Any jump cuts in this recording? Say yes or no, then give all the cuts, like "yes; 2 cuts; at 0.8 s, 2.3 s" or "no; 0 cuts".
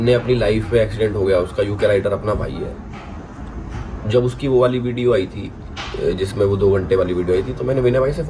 no; 0 cuts